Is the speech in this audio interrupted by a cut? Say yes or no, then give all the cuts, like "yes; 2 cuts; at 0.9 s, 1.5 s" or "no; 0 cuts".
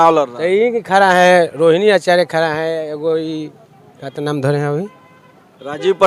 no; 0 cuts